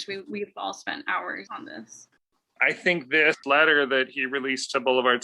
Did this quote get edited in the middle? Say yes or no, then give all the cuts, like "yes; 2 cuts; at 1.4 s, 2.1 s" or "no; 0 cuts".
yes; 3 cuts; at 1.5 s, 2.5 s, 3.4 s